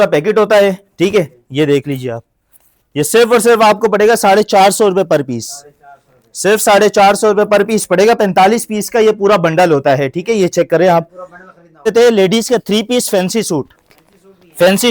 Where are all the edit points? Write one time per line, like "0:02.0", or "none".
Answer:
0:11.9